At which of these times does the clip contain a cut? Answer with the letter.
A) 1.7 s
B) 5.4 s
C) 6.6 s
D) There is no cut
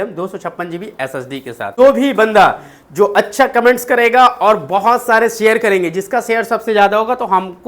A